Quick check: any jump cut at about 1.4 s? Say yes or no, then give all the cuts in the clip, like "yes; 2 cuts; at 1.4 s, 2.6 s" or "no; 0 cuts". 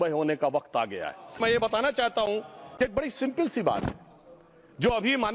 yes; 1 cut; at 1.4 s